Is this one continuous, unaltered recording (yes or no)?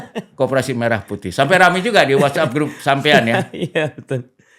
yes